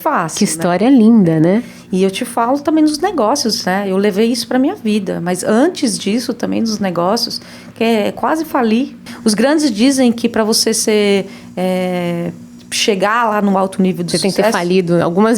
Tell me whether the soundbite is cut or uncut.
cut